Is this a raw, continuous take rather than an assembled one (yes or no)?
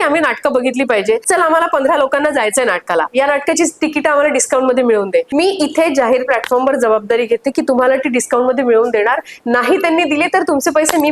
no